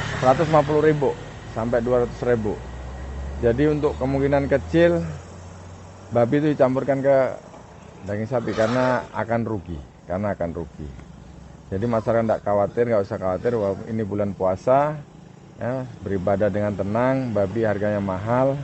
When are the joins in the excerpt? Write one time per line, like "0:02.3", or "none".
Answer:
none